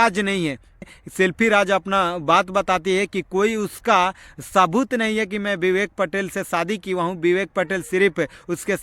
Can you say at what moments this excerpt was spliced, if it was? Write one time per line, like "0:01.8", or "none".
0:00.9